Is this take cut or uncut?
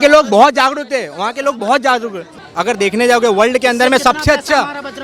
cut